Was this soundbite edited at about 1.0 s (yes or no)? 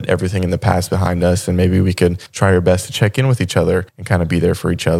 no